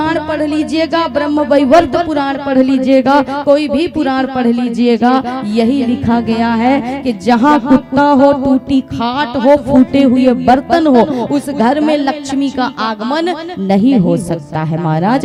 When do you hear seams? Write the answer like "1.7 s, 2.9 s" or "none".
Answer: none